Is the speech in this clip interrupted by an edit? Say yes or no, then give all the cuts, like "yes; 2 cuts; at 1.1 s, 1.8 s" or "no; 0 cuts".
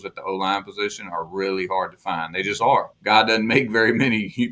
yes; 1 cut; at 2.9 s